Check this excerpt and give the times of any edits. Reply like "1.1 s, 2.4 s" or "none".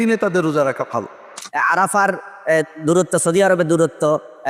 1.4 s